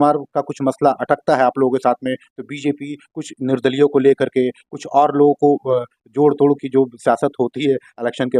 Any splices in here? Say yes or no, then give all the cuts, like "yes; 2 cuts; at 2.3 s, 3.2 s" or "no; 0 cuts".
no; 0 cuts